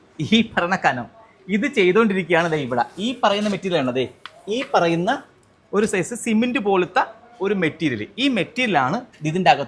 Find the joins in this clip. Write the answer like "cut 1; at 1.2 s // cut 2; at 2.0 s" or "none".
none